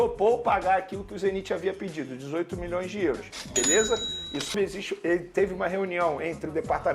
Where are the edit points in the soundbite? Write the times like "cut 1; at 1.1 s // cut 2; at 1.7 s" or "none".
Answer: cut 1; at 4.5 s